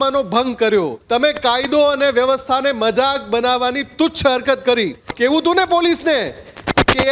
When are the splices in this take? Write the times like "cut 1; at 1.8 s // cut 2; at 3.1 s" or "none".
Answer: cut 1; at 1.0 s // cut 2; at 5.0 s

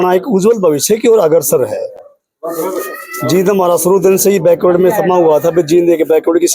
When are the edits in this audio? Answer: none

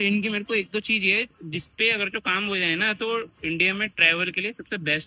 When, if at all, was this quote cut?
none

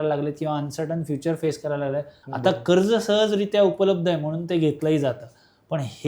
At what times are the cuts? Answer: cut 1; at 2.2 s

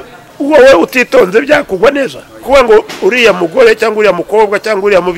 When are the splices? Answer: cut 1; at 2.5 s

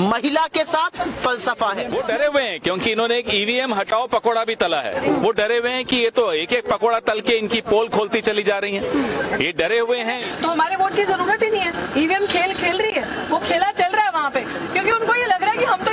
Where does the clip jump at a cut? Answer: cut 1; at 1.9 s // cut 2; at 10.2 s // cut 3; at 14.5 s

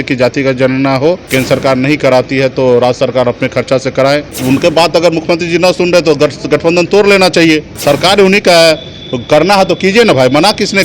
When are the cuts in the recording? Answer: cut 1; at 1.2 s // cut 2; at 4.3 s // cut 3; at 7.8 s

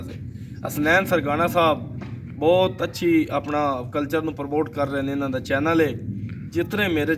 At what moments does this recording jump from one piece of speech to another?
none

